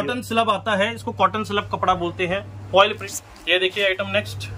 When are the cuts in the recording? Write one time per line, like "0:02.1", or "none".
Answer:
0:03.1